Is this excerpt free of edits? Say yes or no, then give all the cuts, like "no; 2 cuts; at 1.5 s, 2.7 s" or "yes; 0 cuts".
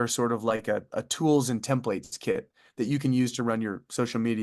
yes; 0 cuts